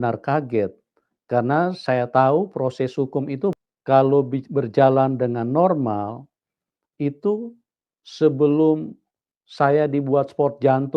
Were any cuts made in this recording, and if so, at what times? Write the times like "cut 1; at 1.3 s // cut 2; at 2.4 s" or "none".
cut 1; at 3.5 s